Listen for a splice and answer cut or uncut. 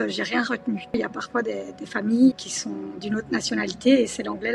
cut